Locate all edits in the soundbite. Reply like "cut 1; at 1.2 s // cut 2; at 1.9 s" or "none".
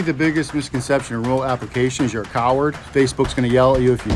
cut 1; at 2.8 s